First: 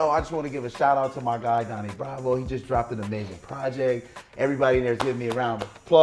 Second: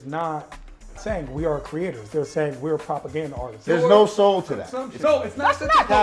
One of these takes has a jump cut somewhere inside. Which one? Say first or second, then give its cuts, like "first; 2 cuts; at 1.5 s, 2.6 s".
second; 3 cuts; at 1.0 s, 3.6 s, 5.0 s